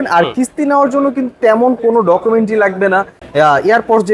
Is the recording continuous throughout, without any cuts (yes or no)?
no